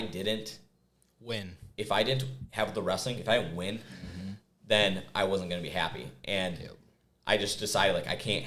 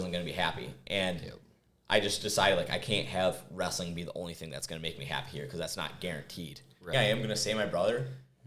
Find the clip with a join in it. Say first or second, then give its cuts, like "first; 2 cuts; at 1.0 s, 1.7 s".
second; 1 cut; at 6.9 s